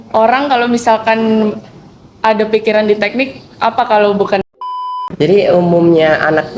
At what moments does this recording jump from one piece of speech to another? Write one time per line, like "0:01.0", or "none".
0:04.9